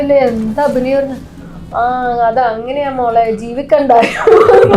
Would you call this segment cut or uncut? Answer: uncut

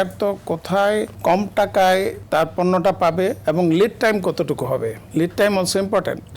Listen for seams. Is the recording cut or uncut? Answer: cut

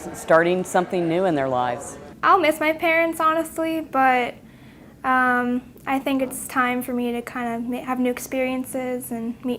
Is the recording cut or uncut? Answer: uncut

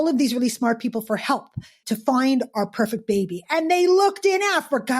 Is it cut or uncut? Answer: cut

